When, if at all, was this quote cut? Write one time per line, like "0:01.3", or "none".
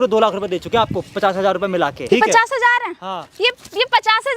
0:02.0